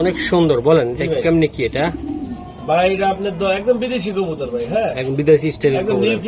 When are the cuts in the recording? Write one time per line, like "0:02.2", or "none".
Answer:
none